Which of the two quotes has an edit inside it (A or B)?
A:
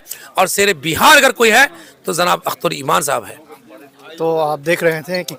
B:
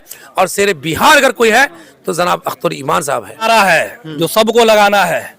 B